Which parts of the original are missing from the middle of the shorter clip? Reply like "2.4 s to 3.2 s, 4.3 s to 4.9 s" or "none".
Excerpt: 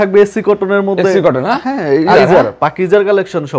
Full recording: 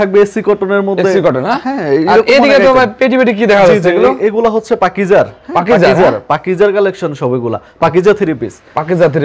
2.2 s to 5.8 s